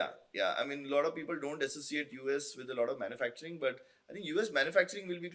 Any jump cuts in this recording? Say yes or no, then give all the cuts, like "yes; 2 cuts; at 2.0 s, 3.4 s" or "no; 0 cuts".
no; 0 cuts